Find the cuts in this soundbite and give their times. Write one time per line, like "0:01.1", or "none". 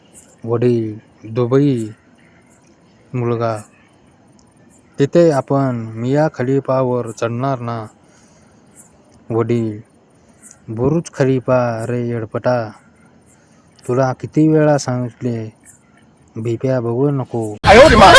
0:16.9